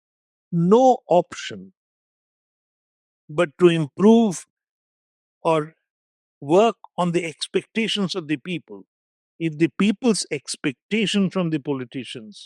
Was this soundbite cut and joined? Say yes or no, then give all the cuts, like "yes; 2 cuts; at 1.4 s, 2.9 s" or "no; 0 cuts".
no; 0 cuts